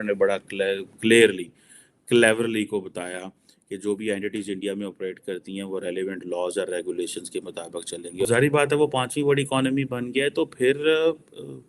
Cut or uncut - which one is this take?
cut